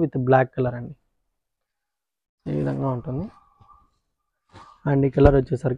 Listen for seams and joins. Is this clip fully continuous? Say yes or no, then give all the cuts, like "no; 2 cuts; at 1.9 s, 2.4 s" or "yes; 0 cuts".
yes; 0 cuts